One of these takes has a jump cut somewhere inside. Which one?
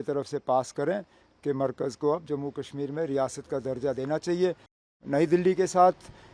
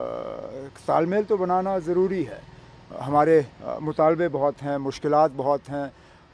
first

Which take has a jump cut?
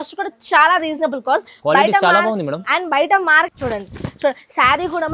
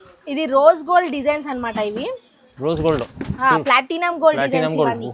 first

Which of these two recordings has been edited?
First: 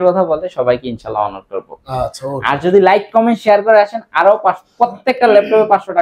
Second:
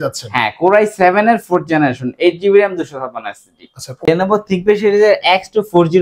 second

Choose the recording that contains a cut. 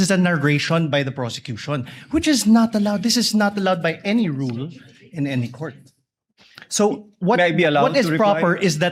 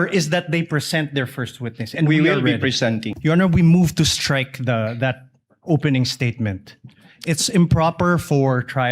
second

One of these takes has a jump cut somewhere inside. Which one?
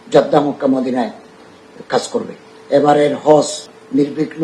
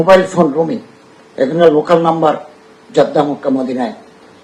first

